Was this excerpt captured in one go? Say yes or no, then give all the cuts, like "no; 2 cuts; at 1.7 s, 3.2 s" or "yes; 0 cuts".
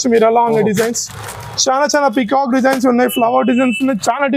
yes; 0 cuts